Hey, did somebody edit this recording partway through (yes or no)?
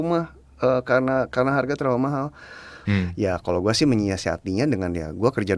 no